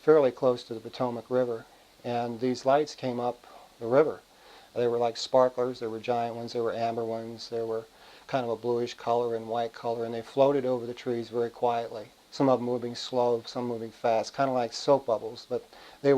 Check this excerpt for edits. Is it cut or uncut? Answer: cut